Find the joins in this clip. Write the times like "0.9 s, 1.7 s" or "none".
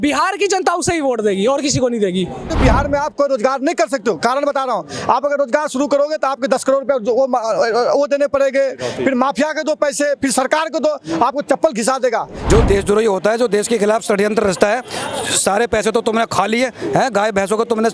2.5 s, 12.3 s